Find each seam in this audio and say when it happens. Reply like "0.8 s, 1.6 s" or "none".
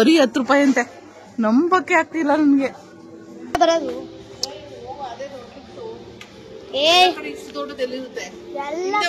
3.6 s